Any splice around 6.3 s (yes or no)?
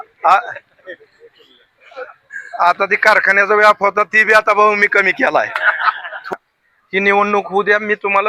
yes